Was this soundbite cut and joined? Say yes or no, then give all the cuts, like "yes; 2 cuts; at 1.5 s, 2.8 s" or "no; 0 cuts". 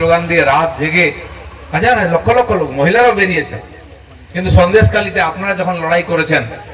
no; 0 cuts